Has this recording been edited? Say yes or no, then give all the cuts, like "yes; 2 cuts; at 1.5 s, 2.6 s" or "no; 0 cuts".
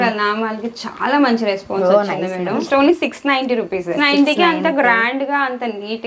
yes; 2 cuts; at 2.6 s, 4.0 s